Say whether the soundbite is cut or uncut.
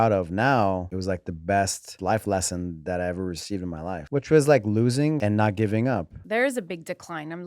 cut